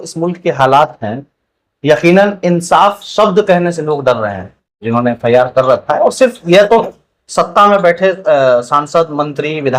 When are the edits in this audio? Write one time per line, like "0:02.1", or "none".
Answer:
0:04.8